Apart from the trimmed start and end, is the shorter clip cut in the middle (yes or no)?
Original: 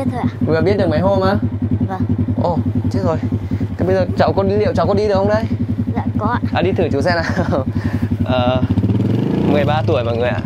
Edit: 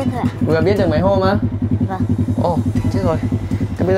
no